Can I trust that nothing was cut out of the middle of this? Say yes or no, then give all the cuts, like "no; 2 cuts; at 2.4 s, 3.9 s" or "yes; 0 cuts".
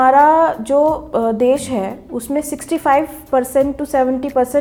yes; 0 cuts